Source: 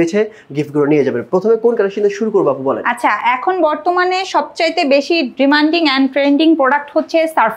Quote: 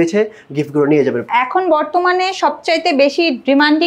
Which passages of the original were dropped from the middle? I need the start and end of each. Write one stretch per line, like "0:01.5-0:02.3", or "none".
0:01.3-0:03.2